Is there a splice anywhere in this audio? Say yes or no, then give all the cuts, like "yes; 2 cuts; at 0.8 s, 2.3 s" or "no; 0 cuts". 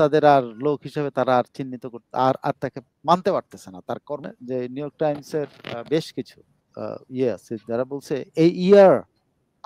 yes; 1 cut; at 4.3 s